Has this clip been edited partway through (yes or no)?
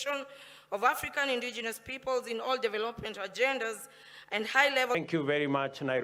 yes